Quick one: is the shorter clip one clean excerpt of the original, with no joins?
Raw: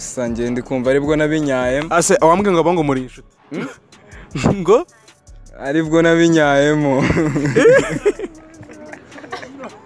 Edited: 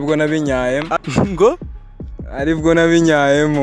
no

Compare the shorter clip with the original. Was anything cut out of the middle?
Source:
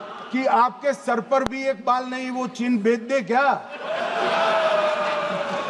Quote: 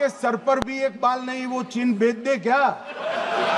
no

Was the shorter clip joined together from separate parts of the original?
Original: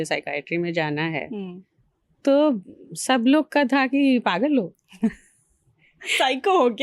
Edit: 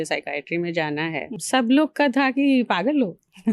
yes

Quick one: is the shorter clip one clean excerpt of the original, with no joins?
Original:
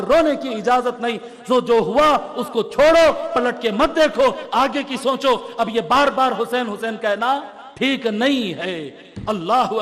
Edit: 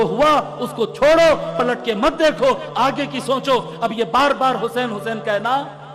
yes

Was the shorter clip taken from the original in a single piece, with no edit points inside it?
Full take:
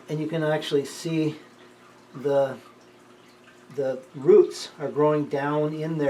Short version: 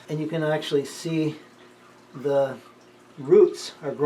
no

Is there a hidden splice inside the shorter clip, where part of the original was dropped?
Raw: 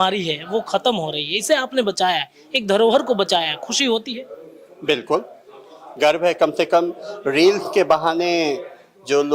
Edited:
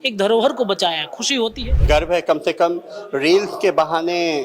yes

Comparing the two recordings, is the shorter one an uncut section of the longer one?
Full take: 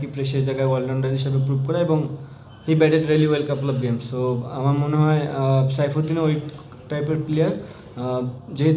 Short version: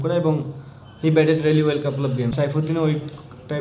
no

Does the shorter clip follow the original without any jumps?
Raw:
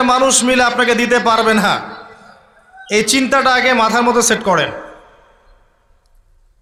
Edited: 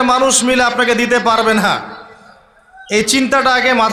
yes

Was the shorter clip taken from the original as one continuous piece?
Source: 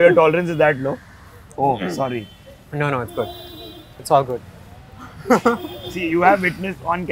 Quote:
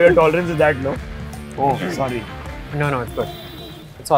yes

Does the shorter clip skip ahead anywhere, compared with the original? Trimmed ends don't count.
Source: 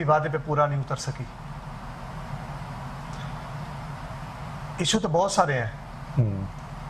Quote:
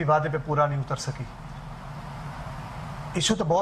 yes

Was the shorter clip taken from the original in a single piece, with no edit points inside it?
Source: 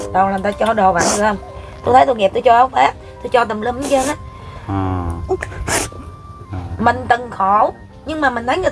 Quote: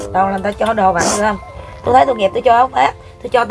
yes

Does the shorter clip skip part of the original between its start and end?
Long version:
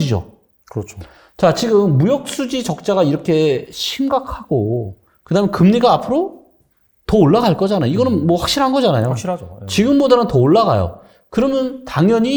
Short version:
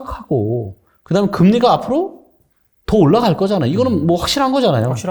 no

